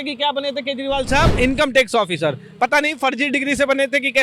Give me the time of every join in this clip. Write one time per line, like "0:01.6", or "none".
0:01.3